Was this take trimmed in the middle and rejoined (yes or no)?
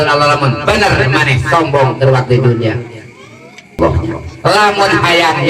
yes